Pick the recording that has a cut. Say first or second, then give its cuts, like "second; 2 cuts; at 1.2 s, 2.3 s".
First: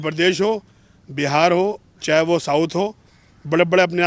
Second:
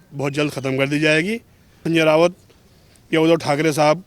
second; 1 cut; at 1.8 s